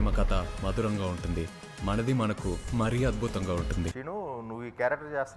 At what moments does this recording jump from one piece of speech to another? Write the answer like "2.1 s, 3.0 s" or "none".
3.9 s

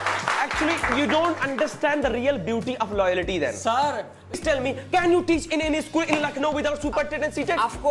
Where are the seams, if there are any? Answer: 4.3 s

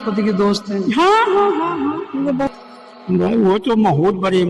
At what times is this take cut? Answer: 2.5 s

